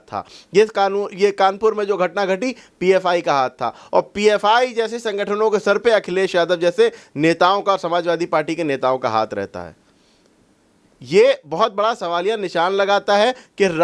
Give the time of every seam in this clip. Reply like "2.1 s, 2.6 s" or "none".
none